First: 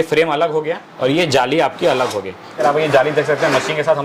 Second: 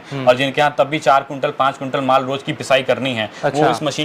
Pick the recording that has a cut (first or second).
first